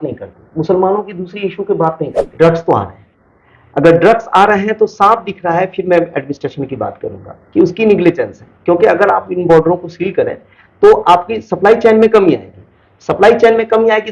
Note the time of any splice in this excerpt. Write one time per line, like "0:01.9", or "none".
0:02.2